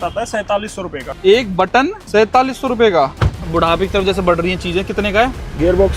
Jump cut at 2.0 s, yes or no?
yes